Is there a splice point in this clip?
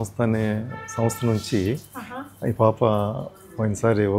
no; 0 cuts

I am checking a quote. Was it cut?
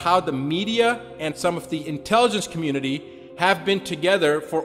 yes; 1 cut; at 1.3 s

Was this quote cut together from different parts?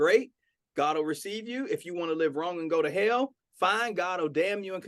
no; 0 cuts

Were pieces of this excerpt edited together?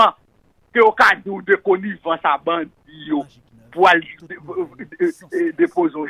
no; 0 cuts

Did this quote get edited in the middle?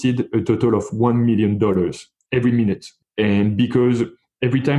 yes; 1 cut; at 2.9 s

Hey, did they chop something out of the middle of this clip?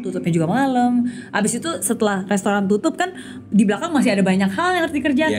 no; 0 cuts

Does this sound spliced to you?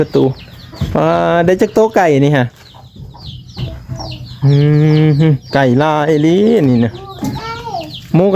no; 0 cuts

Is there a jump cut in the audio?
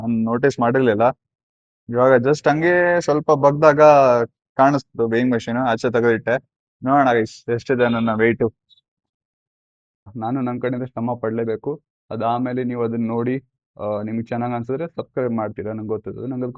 yes; 1 cut; at 10.1 s

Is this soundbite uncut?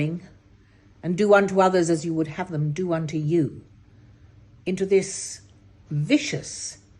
yes; 0 cuts

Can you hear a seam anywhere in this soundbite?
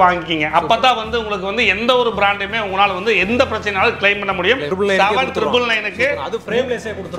yes; 1 cut; at 4.7 s

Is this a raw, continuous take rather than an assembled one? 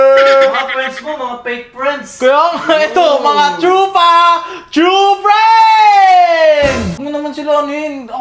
no; 1 cut; at 7.0 s

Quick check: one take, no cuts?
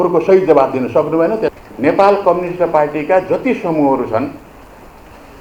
no; 1 cut; at 1.5 s

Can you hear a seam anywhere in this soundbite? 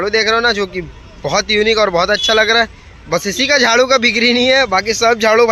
no; 0 cuts

